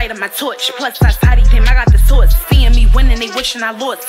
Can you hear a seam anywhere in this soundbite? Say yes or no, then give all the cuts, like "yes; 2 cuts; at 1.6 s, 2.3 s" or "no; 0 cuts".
yes; 1 cut; at 2.8 s